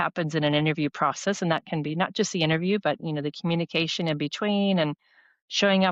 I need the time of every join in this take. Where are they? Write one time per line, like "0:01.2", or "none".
none